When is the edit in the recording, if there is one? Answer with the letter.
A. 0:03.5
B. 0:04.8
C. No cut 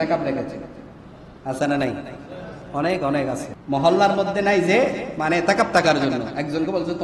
A